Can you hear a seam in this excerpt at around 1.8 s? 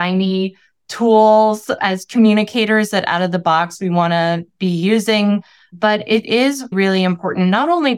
yes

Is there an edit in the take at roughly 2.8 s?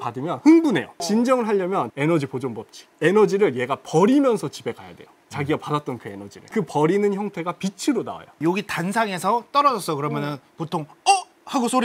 no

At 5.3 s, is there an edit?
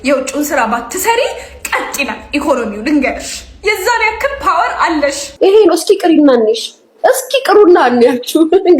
yes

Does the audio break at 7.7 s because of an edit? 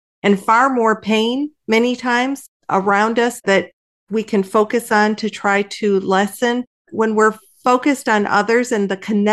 no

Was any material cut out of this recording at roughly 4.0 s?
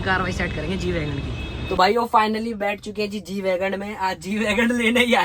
no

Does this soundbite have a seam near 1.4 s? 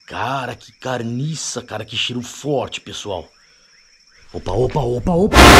no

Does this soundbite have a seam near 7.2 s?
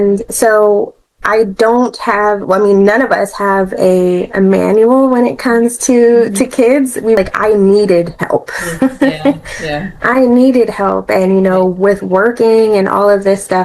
yes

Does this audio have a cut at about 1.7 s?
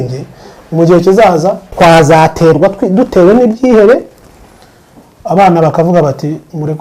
yes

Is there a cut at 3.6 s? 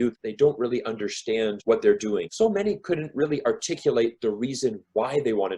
no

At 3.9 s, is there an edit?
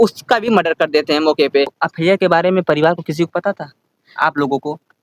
no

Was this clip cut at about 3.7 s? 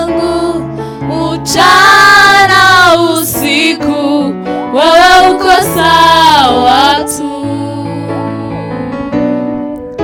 no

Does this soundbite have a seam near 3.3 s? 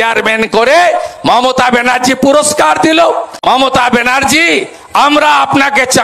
yes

